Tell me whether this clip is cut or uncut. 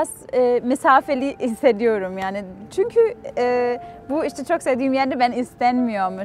uncut